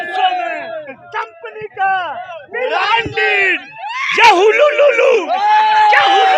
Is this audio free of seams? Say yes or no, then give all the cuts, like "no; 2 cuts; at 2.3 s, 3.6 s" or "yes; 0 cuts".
yes; 0 cuts